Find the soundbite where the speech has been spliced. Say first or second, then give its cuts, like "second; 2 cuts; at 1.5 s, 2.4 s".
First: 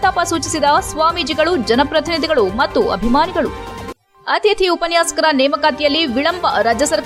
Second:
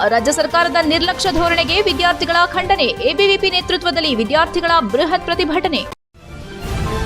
second; 1 cut; at 5.9 s